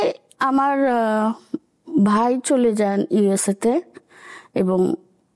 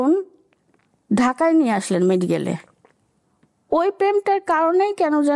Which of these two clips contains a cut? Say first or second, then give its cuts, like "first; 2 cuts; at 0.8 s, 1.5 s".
second; 1 cut; at 3.1 s